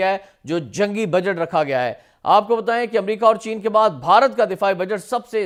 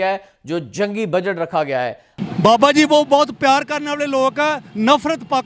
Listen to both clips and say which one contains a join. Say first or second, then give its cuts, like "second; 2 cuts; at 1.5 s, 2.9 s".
second; 1 cut; at 2.1 s